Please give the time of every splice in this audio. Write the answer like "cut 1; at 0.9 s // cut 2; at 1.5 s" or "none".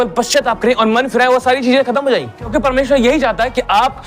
cut 1; at 2.5 s